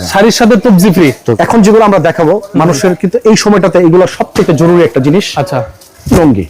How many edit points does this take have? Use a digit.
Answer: 1